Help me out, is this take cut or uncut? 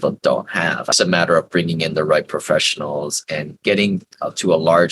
cut